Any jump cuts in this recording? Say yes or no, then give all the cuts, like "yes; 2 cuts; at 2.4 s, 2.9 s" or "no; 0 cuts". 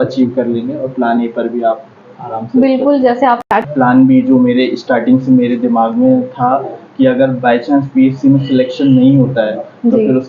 yes; 1 cut; at 3.4 s